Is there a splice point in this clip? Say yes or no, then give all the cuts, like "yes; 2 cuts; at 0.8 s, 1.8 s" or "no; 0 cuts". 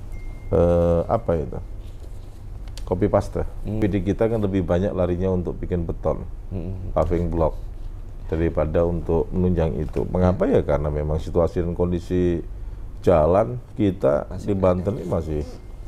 yes; 1 cut; at 3.8 s